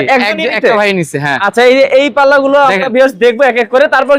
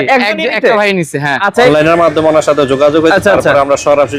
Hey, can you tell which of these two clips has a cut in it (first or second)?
second